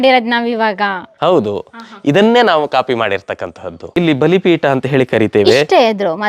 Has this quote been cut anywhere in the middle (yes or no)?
yes